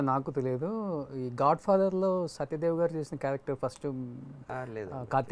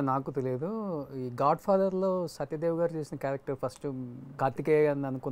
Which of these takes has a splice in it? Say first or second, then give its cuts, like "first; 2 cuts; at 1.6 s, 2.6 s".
second; 1 cut; at 4.3 s